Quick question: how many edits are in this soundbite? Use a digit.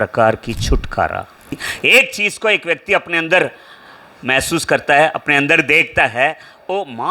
1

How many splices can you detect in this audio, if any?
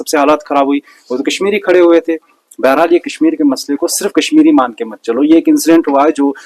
0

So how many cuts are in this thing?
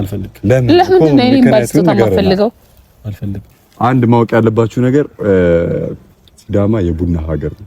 1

